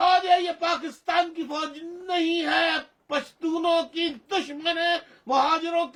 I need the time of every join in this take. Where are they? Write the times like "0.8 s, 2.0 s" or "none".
none